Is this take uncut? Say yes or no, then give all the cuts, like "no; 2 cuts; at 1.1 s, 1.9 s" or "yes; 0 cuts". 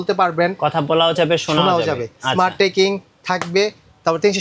yes; 0 cuts